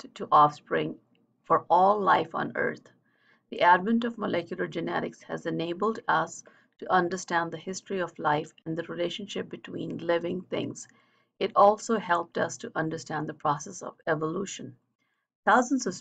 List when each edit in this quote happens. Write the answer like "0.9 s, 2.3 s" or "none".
4.5 s